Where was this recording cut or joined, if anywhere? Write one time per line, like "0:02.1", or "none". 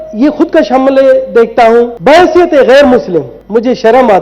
0:01.9
0:03.4